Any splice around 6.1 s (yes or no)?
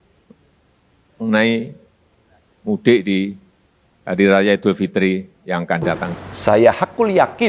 yes